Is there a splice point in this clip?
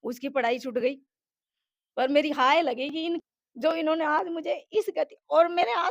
yes; 1 cut; at 3.2 s

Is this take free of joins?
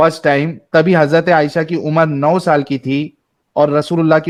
yes; 0 cuts

